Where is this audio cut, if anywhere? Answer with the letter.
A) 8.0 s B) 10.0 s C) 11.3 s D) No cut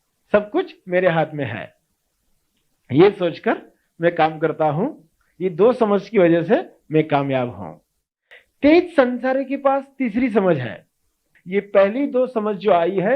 C